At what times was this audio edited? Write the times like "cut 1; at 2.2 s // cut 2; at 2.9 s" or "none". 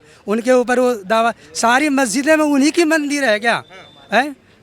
none